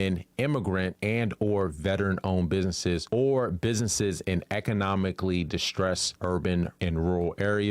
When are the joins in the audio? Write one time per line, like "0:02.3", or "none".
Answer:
0:06.1
0:06.7